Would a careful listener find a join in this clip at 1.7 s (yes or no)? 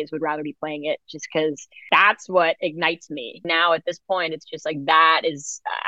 yes